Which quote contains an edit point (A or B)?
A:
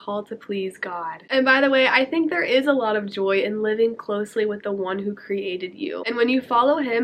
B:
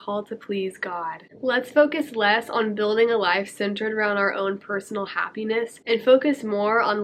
B